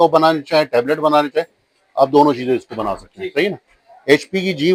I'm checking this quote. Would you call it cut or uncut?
uncut